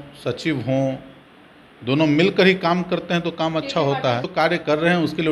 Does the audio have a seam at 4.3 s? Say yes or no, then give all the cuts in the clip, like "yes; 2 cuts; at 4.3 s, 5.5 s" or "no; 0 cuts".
yes; 1 cut; at 4.3 s